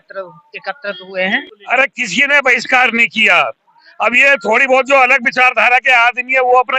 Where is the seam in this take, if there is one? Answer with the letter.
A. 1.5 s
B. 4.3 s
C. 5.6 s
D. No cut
A